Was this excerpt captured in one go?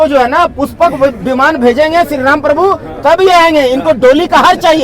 yes; 0 cuts

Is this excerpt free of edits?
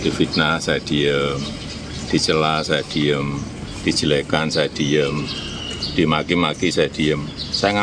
yes; 0 cuts

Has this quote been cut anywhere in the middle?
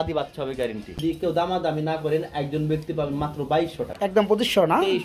yes; 2 cuts; at 1.1 s, 3.9 s

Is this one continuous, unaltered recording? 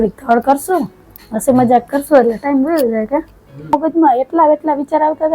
no; 1 cut; at 3.7 s

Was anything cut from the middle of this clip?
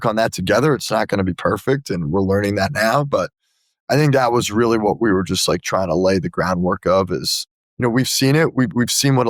no; 0 cuts

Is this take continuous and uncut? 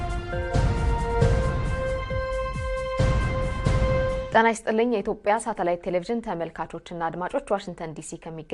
no; 1 cut; at 4.3 s

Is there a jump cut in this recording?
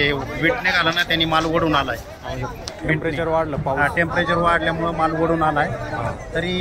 no; 0 cuts

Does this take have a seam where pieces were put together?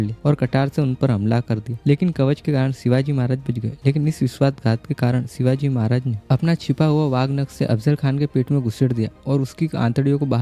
no; 0 cuts

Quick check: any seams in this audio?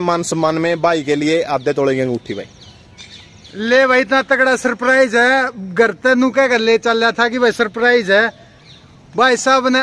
no; 0 cuts

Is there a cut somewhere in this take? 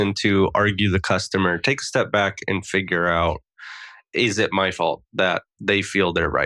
no; 0 cuts

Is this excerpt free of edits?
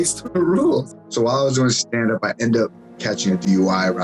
no; 2 cuts; at 1.0 s, 2.9 s

